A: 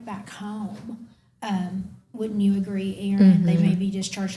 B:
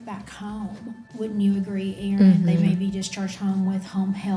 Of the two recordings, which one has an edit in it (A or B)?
B